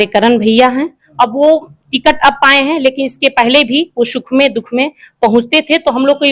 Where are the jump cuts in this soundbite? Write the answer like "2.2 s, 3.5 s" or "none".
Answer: 1.0 s